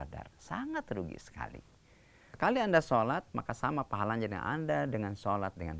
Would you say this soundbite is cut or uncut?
cut